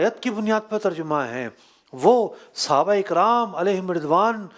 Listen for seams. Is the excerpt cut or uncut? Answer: uncut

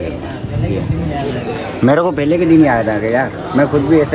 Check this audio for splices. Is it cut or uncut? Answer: uncut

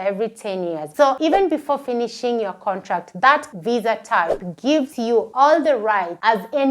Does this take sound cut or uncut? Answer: cut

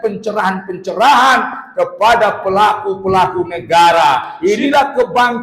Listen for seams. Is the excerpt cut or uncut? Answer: cut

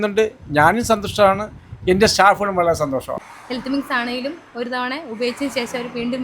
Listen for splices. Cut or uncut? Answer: cut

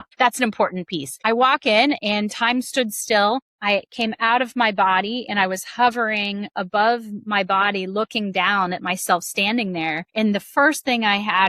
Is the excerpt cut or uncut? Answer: cut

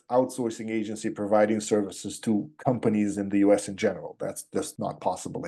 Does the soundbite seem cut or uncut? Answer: uncut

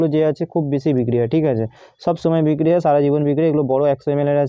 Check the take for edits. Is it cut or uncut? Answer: uncut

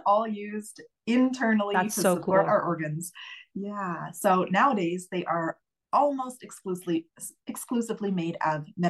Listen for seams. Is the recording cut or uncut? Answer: uncut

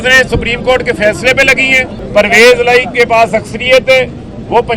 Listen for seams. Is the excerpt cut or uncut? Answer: cut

